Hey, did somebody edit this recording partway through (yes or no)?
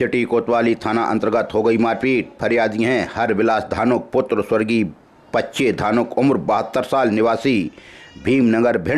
no